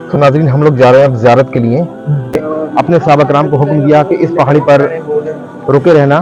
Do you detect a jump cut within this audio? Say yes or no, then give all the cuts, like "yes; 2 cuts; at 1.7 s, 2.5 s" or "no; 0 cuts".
yes; 1 cut; at 2.4 s